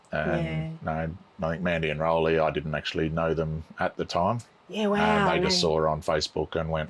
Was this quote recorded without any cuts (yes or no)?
yes